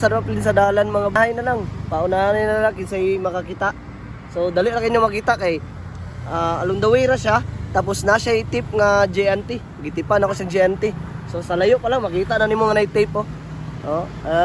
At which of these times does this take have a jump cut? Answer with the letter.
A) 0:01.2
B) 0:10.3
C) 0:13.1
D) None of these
A